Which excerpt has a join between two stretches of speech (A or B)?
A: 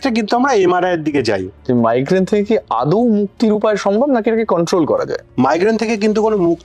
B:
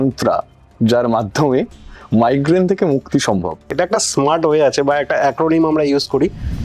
A